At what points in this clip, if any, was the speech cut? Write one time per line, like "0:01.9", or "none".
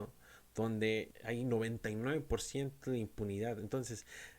0:01.1

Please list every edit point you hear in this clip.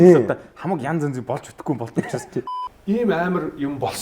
0:02.5

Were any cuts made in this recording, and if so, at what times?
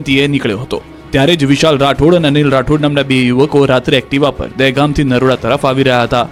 none

